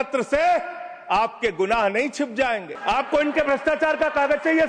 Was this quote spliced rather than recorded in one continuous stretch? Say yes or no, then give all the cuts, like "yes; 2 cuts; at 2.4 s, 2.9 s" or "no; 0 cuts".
yes; 1 cut; at 2.7 s